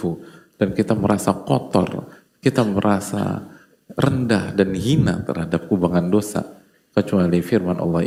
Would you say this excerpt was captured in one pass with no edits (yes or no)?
yes